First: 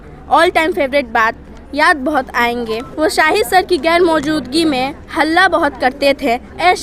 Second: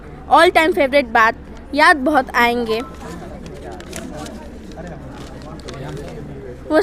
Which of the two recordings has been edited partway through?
first; 1 cut; at 2.9 s

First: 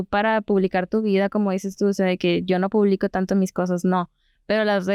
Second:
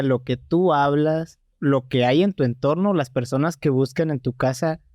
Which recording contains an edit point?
second; 1 cut; at 1.5 s

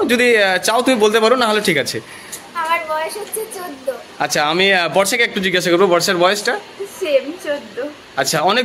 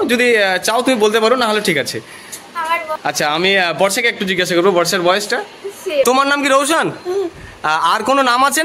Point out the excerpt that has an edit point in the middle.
second; 2 cuts; at 3.0 s, 6.1 s

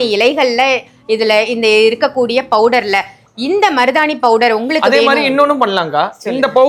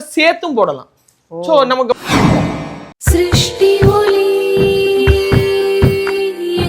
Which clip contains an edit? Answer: second; 2 cuts; at 1.9 s, 2.8 s

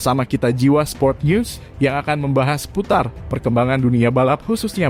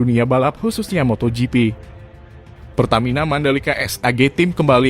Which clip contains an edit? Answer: second; 1 cut; at 2.4 s

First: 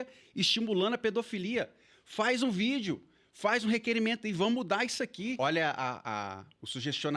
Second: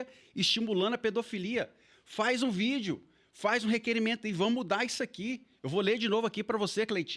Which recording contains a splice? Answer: first; 1 cut; at 5.4 s

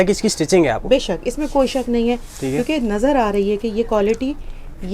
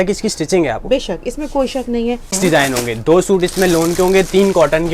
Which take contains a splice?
second; 1 cut; at 2.4 s

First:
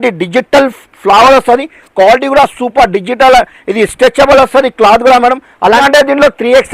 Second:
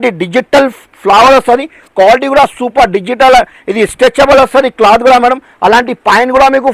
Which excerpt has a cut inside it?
first; 1 cut; at 5.8 s

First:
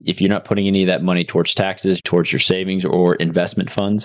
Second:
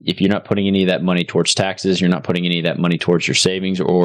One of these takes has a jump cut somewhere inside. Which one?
first; 1 cut; at 2.0 s

